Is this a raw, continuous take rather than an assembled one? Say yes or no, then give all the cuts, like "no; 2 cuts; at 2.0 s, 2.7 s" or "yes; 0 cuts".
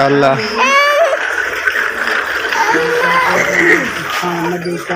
yes; 0 cuts